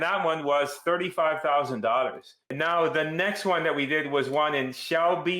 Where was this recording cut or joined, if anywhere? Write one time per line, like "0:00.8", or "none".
0:02.4